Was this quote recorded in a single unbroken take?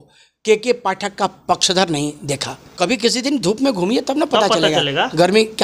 no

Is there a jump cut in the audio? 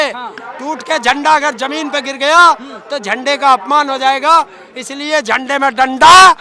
no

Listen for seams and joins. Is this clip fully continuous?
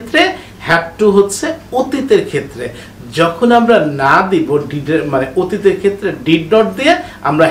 yes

